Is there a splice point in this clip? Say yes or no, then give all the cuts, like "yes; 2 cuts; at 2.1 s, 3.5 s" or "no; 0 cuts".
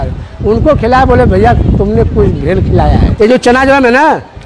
yes; 1 cut; at 3.1 s